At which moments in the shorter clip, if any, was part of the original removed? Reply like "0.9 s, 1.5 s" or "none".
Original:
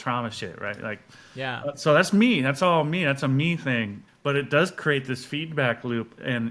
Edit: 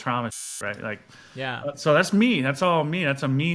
none